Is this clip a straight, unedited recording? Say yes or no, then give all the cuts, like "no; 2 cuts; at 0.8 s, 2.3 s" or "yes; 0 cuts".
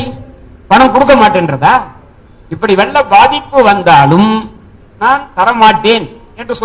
yes; 0 cuts